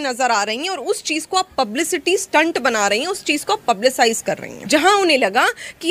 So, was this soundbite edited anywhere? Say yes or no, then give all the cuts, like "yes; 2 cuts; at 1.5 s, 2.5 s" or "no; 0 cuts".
yes; 1 cut; at 4.5 s